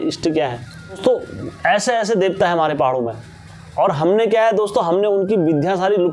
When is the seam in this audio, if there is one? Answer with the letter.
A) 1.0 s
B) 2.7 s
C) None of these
A